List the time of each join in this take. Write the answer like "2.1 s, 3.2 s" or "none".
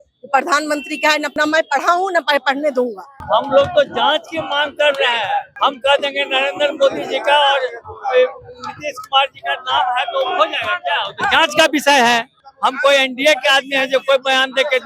1.3 s, 3.2 s, 5.5 s, 12.3 s